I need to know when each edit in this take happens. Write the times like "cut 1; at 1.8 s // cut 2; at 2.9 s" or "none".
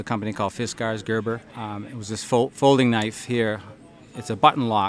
cut 1; at 1.5 s

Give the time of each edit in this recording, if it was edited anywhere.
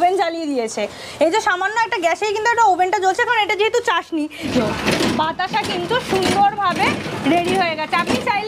cut 1; at 4.5 s

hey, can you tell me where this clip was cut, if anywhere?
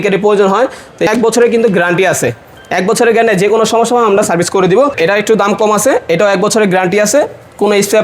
cut 1; at 1.1 s // cut 2; at 4.9 s

